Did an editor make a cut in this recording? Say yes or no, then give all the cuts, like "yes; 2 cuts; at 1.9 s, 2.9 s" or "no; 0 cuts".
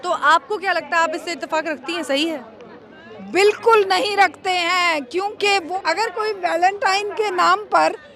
yes; 1 cut; at 5.7 s